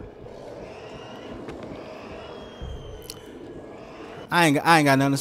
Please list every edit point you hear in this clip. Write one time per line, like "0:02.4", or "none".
none